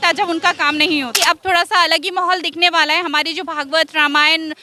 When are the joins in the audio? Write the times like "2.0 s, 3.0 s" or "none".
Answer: 1.1 s